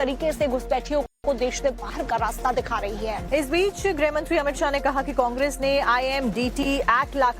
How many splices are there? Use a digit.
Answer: 1